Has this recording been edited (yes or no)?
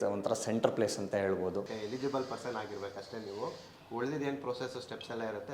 yes